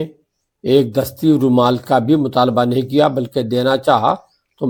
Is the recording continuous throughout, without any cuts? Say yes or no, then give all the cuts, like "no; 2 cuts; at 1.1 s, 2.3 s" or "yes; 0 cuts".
yes; 0 cuts